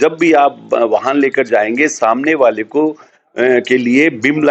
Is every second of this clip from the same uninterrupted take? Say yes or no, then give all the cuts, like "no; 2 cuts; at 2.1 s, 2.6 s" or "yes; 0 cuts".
yes; 0 cuts